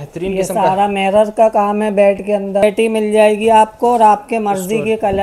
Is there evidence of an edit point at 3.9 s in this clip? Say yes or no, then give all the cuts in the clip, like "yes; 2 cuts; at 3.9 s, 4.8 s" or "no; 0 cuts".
no; 1 cut; at 2.6 s